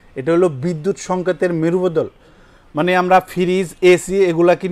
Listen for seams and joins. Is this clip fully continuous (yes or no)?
yes